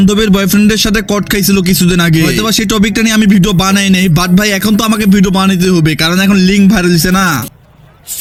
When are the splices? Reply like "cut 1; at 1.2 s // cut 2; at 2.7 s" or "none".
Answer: none